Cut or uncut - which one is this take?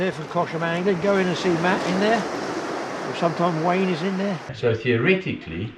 cut